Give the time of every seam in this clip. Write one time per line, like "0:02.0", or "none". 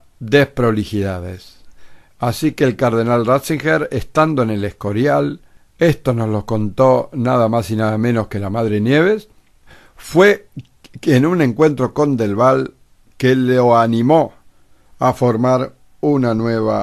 none